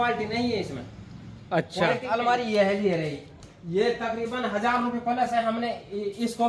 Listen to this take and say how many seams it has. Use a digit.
1